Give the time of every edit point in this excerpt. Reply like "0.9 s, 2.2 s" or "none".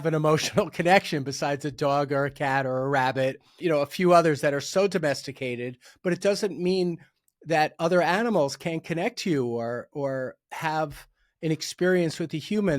3.5 s, 5.8 s